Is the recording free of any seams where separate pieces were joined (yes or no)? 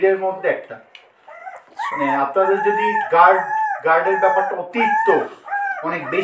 yes